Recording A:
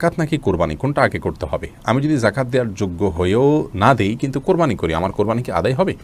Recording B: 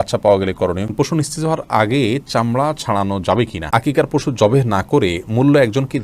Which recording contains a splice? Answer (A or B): B